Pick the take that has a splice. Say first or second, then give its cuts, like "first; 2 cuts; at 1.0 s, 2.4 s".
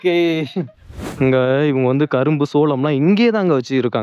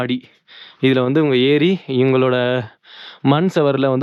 first; 1 cut; at 1.1 s